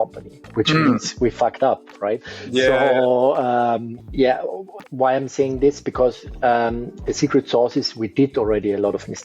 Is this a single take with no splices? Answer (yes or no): no